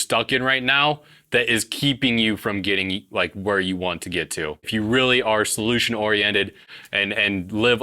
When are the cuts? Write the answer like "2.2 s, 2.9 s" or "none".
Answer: 4.7 s, 6.6 s